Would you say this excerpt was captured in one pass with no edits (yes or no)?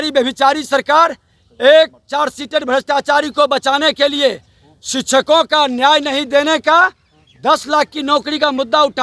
yes